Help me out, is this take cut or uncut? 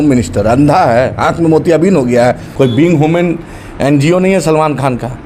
cut